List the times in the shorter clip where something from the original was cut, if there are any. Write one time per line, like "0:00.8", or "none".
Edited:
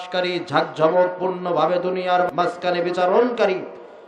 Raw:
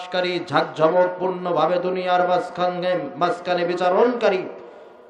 0:02.3